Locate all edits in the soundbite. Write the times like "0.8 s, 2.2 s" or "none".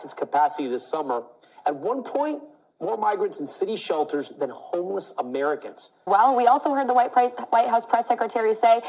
6.0 s